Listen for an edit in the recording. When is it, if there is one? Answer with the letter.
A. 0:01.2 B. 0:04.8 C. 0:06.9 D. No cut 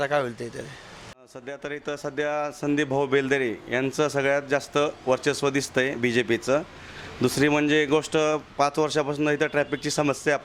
A